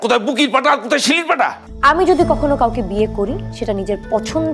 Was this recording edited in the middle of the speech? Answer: yes; 1 cut; at 1.6 s

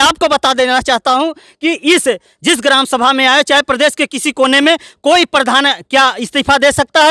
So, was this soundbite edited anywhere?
no; 0 cuts

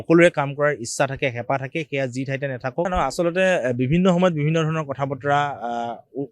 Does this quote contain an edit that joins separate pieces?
yes; 1 cut; at 2.9 s

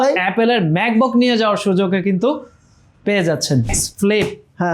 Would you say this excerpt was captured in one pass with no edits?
no; 1 cut; at 3.8 s

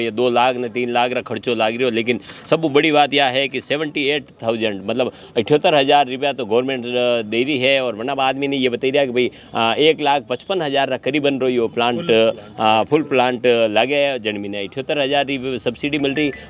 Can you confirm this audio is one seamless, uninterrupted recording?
yes; 0 cuts

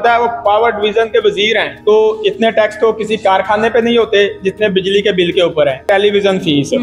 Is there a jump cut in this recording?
yes; 2 cuts; at 1.7 s, 5.8 s

